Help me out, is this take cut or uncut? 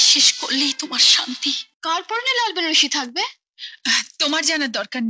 cut